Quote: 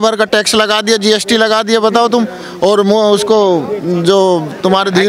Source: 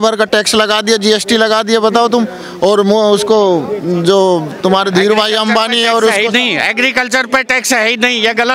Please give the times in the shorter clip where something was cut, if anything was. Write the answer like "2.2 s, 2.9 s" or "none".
none